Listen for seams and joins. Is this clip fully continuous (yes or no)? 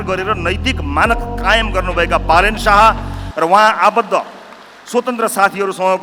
yes